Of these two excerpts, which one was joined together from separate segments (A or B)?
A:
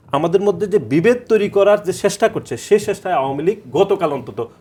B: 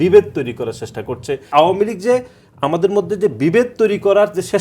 B